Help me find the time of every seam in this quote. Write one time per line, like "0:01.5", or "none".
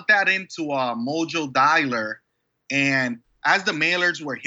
0:03.2